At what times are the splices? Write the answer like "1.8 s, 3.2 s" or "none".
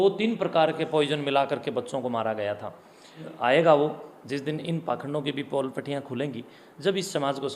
3.3 s